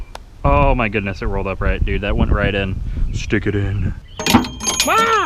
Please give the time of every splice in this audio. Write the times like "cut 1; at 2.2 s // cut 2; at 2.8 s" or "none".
cut 1; at 4.0 s